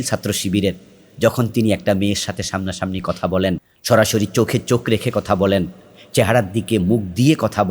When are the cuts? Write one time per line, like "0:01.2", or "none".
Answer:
0:03.7

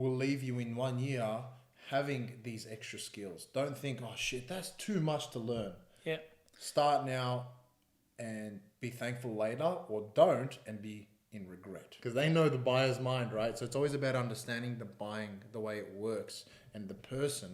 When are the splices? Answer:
0:11.9

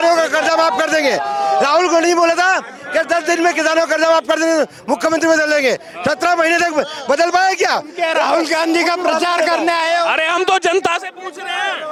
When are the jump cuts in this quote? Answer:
none

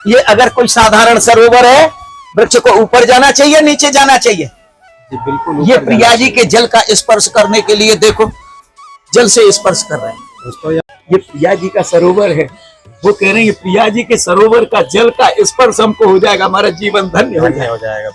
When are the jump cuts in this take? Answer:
0:10.8

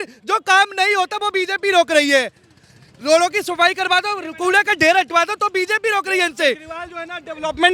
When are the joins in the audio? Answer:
none

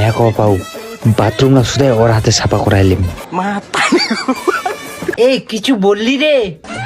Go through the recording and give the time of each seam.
0:05.1

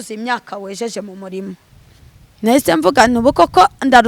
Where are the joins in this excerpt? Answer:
none

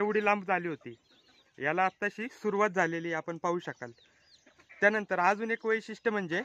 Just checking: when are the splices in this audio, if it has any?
none

